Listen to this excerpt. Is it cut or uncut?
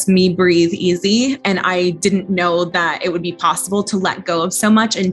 cut